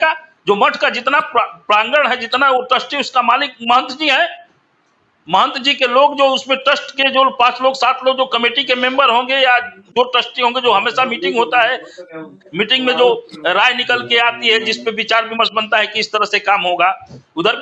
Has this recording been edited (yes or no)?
no